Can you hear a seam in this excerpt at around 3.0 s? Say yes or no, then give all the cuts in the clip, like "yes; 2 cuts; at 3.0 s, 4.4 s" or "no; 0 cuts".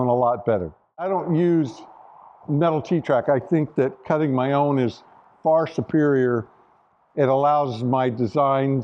no; 1 cut; at 1.1 s